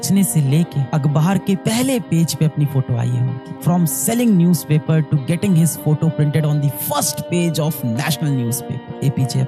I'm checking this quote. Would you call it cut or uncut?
uncut